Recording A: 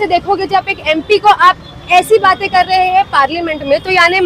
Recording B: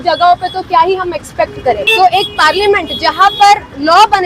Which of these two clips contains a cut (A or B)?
B